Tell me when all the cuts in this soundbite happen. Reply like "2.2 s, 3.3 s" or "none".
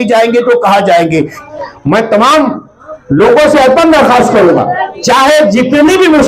1.4 s